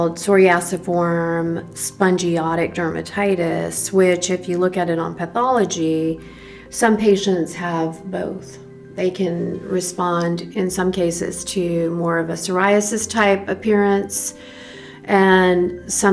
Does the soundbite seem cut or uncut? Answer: uncut